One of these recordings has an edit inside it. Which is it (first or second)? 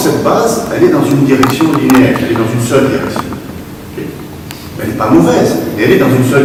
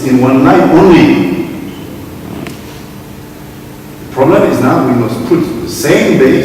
second